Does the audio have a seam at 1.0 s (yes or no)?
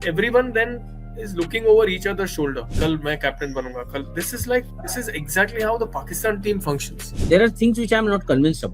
no